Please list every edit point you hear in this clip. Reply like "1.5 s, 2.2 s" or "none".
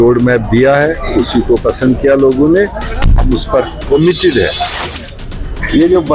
4.9 s